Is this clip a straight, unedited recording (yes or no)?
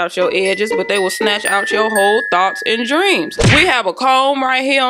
yes